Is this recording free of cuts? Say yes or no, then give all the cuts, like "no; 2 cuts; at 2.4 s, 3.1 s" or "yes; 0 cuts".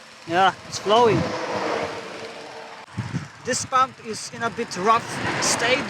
no; 1 cut; at 2.9 s